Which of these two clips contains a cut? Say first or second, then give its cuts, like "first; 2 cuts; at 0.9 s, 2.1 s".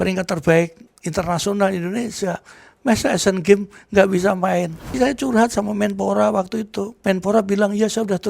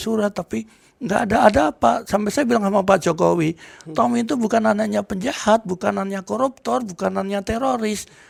first; 2 cuts; at 5.0 s, 6.9 s